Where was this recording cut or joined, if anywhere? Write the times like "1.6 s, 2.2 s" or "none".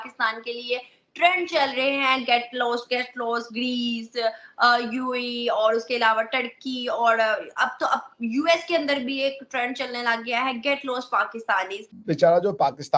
11.9 s